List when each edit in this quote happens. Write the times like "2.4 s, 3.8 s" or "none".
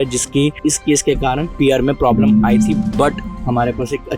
1.5 s